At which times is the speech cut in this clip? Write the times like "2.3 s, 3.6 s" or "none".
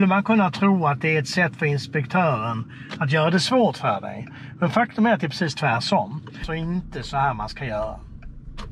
6.5 s

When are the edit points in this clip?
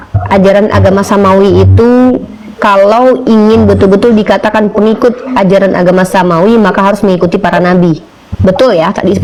none

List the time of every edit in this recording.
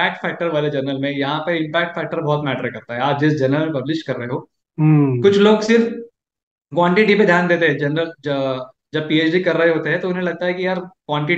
none

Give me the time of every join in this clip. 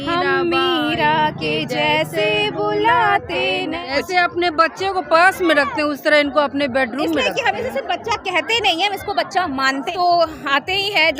3.8 s, 9.9 s

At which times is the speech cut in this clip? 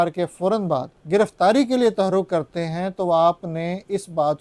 0.9 s

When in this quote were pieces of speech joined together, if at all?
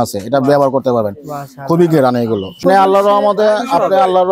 2.6 s

